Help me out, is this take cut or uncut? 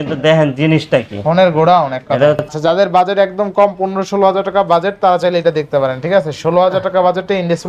cut